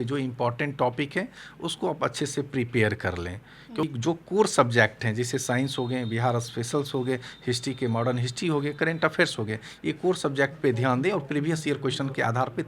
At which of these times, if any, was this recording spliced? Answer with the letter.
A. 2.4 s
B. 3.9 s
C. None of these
B